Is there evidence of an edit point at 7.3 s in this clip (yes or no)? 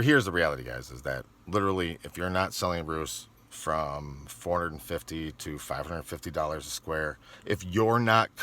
yes